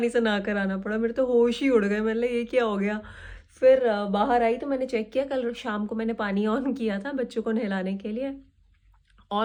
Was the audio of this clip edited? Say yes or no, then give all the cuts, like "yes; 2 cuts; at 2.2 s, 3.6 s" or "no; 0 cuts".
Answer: no; 0 cuts